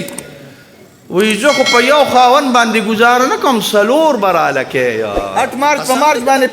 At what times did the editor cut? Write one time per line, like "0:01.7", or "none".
0:05.2